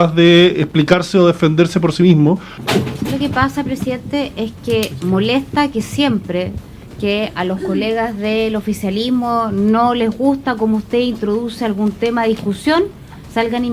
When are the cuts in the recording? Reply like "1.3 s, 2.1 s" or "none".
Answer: 2.5 s